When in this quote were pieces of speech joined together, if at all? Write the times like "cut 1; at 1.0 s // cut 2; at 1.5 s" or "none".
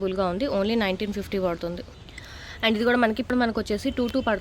cut 1; at 3.3 s